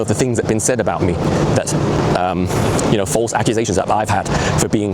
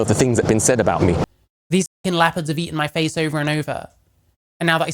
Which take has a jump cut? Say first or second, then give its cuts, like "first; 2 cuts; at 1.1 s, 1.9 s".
second; 1 cut; at 1.2 s